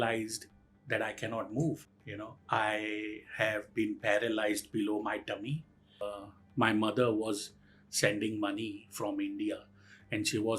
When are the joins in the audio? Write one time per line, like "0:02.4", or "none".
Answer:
0:06.0